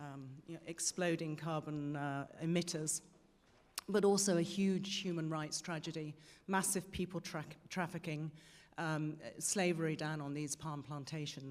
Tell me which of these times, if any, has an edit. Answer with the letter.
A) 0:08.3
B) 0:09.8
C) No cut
B